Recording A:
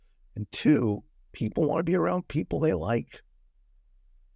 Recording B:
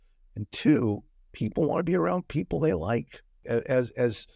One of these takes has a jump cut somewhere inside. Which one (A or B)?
B